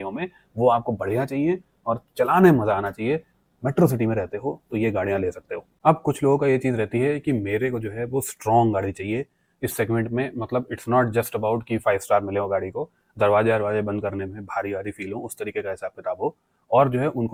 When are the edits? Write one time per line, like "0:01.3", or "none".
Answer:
none

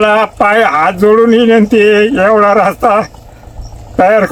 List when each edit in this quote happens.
none

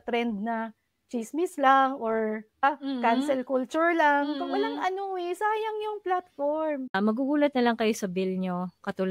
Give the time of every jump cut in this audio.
0:02.6
0:06.9

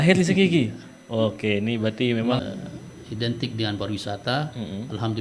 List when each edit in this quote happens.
0:02.4

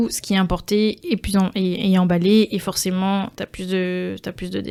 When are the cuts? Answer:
none

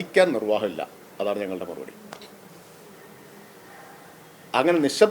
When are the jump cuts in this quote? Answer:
none

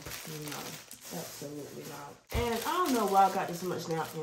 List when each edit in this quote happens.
0:02.1

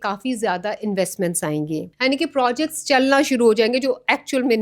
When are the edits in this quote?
0:01.9

